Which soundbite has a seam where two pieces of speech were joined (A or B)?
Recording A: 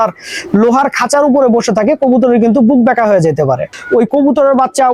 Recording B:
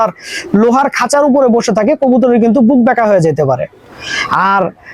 A